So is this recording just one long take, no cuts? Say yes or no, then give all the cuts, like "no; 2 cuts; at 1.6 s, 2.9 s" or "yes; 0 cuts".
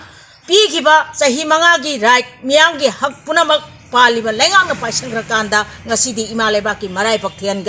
yes; 0 cuts